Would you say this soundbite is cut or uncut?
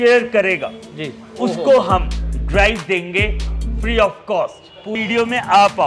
cut